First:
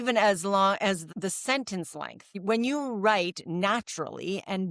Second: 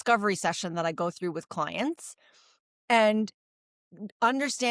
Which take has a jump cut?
first; 2 cuts; at 1.0 s, 2.2 s

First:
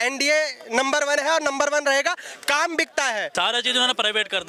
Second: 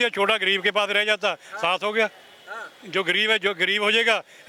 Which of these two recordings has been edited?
first; 1 cut; at 3.3 s

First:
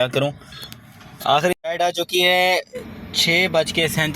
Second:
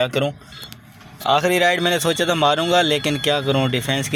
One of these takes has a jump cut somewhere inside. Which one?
first; 1 cut; at 1.5 s

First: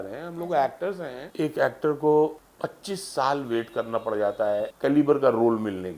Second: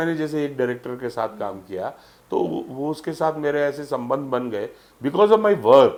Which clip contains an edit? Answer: first; 3 cuts; at 1.2 s, 2.5 s, 4.7 s

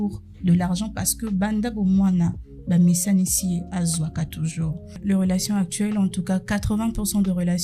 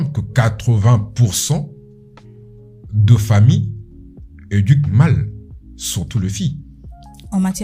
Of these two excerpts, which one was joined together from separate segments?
first; 1 cut; at 5.0 s

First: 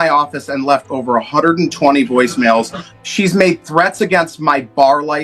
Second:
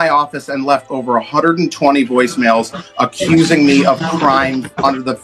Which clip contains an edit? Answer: first; 1 cut; at 2.8 s

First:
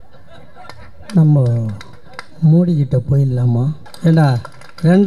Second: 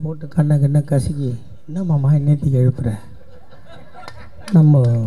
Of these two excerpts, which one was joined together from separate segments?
first; 1 cut; at 3.9 s

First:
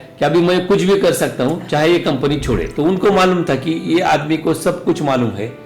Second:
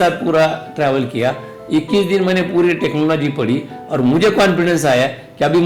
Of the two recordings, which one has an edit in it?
first; 1 cut; at 2.7 s

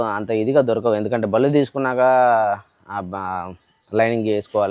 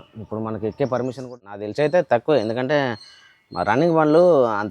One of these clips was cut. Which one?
second; 1 cut; at 1.3 s

